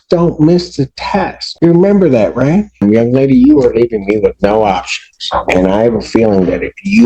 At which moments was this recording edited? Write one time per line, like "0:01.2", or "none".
0:01.4
0:02.8